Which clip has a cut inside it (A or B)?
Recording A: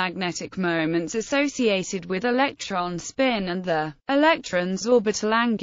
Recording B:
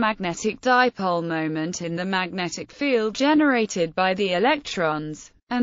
A